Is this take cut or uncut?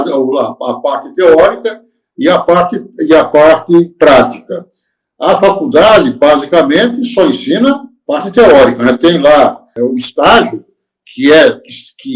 cut